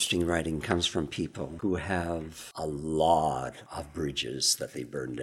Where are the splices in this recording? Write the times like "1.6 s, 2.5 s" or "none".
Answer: 1.5 s, 2.4 s, 3.6 s